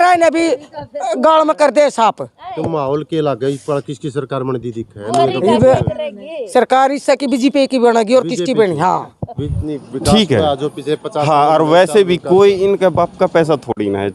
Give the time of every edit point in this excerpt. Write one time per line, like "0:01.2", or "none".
0:09.3